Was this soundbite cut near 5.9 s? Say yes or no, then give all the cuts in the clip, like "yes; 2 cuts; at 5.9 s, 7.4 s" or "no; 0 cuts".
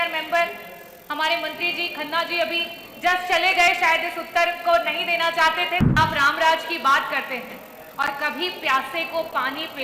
yes; 1 cut; at 5.9 s